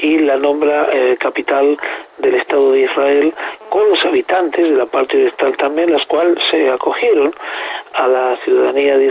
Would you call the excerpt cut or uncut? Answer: uncut